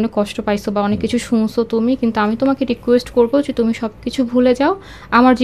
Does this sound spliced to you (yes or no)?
no